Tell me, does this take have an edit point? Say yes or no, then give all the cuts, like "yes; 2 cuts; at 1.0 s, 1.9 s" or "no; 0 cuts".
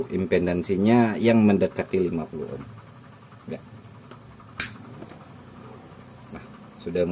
no; 0 cuts